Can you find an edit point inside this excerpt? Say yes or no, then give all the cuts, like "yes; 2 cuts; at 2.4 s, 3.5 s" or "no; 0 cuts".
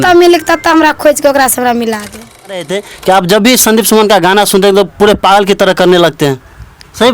yes; 1 cut; at 2.5 s